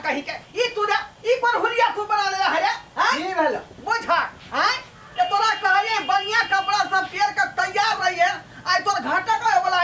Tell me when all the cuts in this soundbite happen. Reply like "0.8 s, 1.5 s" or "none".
none